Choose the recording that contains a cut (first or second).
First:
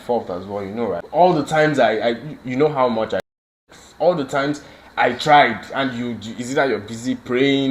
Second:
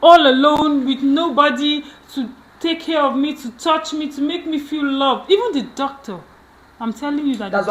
first